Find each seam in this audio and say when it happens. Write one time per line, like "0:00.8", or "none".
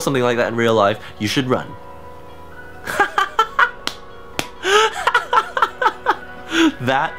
none